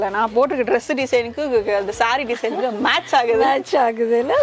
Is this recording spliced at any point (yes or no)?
no